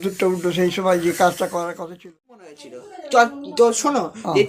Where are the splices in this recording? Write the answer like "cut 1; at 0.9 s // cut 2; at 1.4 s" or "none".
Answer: cut 1; at 2.5 s